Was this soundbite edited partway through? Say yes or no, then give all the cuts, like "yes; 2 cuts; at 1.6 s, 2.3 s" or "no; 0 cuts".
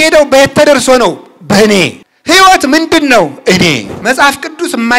yes; 2 cuts; at 2.1 s, 3.9 s